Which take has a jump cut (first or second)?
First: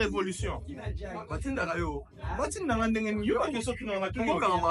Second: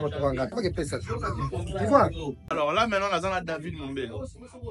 second